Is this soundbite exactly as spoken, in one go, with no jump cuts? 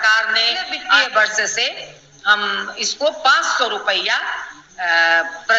no; 1 cut; at 1.0 s

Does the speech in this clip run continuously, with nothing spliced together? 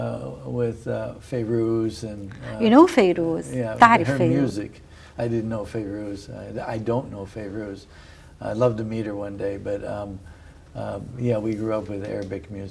yes; 0 cuts

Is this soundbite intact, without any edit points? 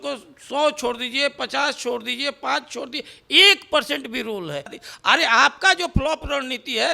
no; 1 cut; at 4.8 s

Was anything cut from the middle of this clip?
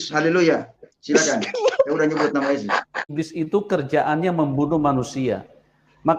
yes; 1 cut; at 3.1 s

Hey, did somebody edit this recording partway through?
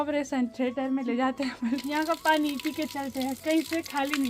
yes; 1 cut; at 1.9 s

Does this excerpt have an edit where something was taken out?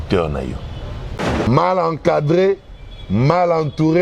yes; 1 cut; at 1.5 s

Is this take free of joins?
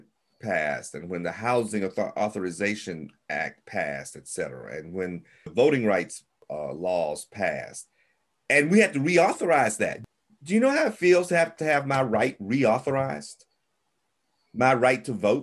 no; 4 cuts; at 5.5 s, 6.5 s, 10.0 s, 11.5 s

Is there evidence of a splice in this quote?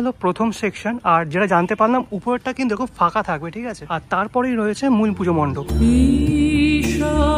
no; 0 cuts

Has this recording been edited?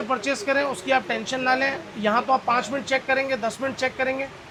no; 0 cuts

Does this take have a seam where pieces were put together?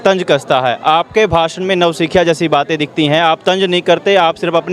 no; 0 cuts

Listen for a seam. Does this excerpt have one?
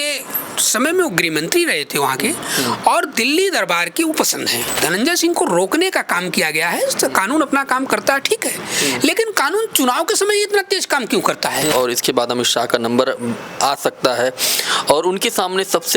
yes; 2 cuts; at 4.7 s, 11.7 s

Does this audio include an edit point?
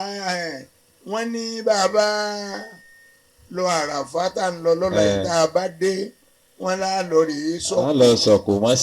no; 0 cuts

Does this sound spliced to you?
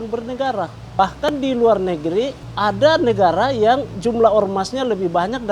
yes; 2 cuts; at 1.0 s, 2.4 s

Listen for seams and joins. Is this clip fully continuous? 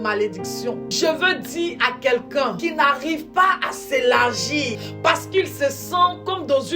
no; 3 cuts; at 0.9 s, 2.6 s, 4.8 s

